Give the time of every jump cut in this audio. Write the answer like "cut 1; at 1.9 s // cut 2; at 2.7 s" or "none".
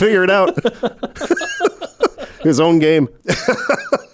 cut 1; at 3.2 s